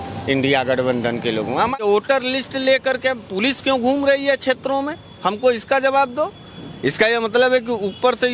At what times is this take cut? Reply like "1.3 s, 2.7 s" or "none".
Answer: 2.0 s

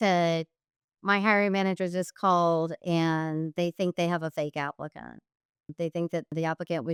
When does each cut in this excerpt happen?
none

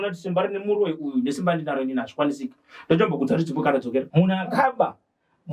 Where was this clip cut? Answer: 4.1 s

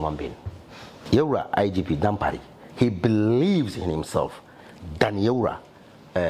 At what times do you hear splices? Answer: 1.0 s

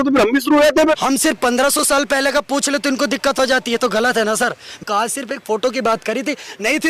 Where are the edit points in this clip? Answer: 1.0 s, 4.9 s

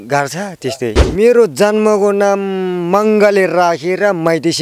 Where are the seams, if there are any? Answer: 1.0 s

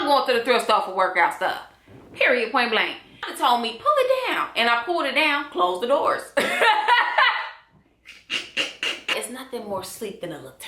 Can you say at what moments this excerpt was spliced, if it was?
3.1 s, 9.1 s

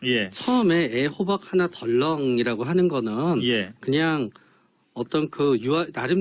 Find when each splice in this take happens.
4.0 s

